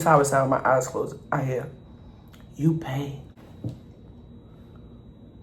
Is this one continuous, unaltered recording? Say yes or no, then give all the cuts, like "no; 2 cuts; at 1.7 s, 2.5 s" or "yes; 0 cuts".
no; 1 cut; at 3.2 s